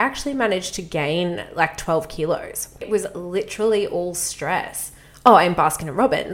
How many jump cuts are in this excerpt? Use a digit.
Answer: 1